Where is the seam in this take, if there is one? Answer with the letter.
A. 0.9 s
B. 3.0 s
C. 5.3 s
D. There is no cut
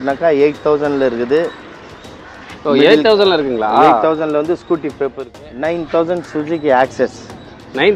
C